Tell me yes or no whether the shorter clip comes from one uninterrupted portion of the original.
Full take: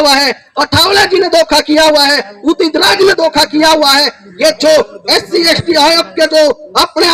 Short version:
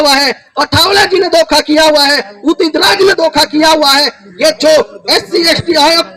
yes